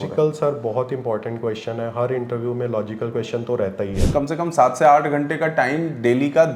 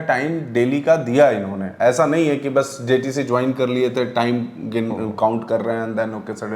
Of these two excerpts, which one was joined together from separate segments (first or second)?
first